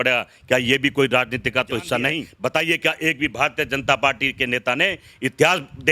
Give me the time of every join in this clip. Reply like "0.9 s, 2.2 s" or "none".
2.3 s